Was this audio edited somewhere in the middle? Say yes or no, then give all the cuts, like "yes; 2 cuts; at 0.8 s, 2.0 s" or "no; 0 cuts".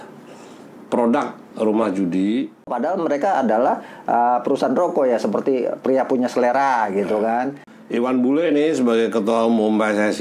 yes; 2 cuts; at 2.7 s, 7.7 s